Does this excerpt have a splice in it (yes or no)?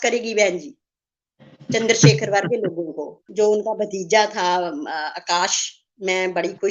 yes